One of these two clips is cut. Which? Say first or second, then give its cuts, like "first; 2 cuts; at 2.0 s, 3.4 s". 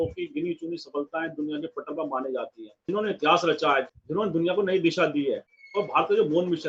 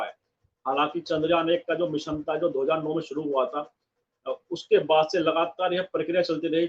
first; 3 cuts; at 2.9 s, 3.9 s, 5.6 s